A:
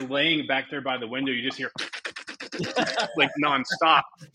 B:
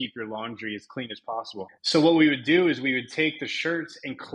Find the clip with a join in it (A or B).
B